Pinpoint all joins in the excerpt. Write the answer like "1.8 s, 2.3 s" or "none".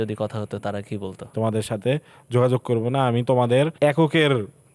1.3 s, 3.7 s